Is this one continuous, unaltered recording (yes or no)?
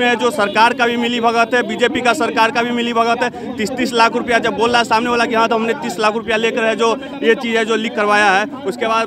yes